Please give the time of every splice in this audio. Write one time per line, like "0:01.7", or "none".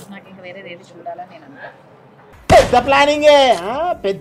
none

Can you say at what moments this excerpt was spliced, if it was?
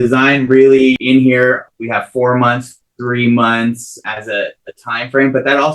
0:01.0
0:01.7
0:04.0

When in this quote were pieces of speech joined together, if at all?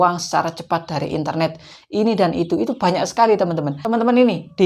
0:03.7

